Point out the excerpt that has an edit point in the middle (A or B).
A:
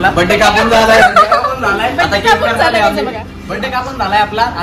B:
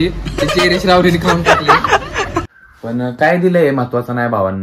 B